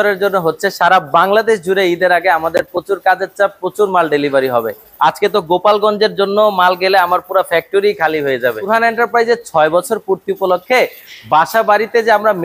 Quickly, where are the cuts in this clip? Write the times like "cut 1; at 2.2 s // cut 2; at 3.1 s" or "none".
cut 1; at 8.7 s